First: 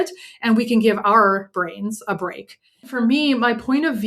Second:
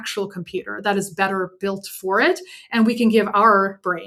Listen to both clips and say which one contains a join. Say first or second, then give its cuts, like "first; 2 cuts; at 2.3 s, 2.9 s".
first; 1 cut; at 2.9 s